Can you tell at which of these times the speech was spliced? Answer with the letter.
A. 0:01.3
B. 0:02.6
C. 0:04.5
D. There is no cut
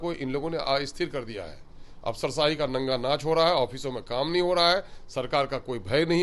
D